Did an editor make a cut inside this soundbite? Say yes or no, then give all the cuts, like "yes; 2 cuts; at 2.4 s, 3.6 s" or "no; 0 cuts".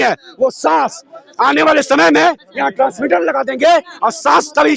no; 0 cuts